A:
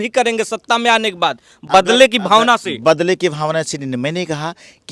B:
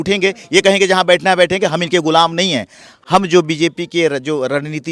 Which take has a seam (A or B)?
B